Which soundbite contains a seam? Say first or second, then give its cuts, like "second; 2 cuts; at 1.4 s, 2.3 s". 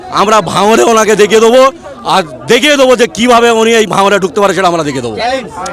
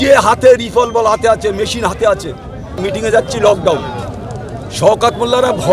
second; 1 cut; at 2.8 s